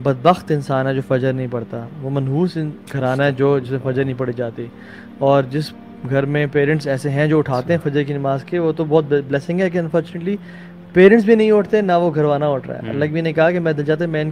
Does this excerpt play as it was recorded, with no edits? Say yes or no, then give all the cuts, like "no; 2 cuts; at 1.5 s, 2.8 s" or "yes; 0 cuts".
yes; 0 cuts